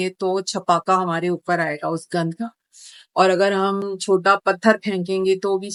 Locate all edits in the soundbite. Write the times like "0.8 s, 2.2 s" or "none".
none